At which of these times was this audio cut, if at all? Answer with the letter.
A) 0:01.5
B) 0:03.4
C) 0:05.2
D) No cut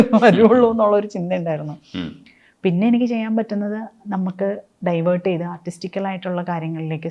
D